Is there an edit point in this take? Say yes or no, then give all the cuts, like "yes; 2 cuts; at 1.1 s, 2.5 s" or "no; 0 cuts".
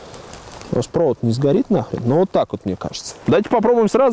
no; 0 cuts